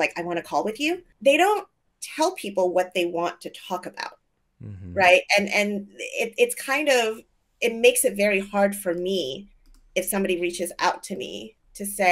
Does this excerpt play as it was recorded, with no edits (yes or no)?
no